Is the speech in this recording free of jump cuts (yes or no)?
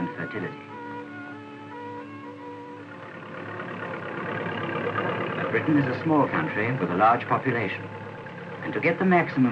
yes